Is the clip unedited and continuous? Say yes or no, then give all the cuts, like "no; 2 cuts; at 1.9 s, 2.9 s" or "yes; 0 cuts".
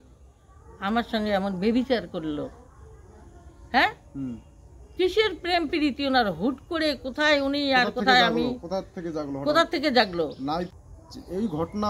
no; 1 cut; at 10.7 s